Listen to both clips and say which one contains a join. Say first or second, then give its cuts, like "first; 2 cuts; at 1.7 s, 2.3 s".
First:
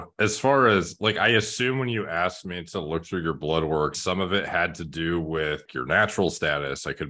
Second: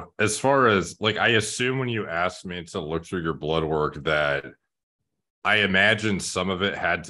first; 2 cuts; at 4.0 s, 5.7 s